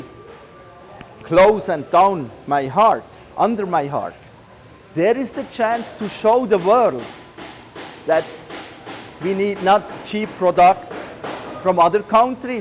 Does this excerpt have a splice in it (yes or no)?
no